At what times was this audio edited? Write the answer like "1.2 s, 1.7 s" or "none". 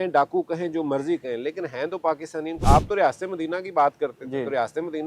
2.6 s